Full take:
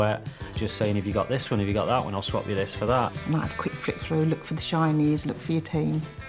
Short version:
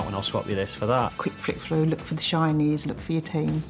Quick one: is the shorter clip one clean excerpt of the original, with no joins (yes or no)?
no